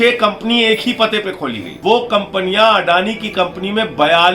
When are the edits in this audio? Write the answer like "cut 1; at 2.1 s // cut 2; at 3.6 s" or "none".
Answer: cut 1; at 1.7 s